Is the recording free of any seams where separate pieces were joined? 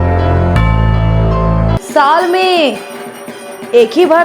no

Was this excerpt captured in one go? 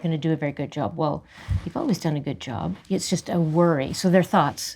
no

